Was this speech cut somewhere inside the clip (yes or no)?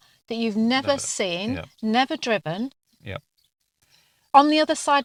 no